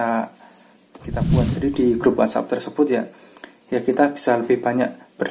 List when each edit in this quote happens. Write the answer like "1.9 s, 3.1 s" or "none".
1.2 s